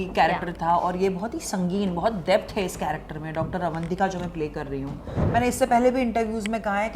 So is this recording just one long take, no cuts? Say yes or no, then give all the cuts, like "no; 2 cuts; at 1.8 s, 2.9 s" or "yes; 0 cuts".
no; 1 cut; at 5.1 s